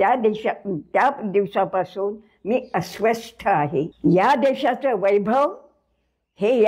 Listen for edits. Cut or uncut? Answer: cut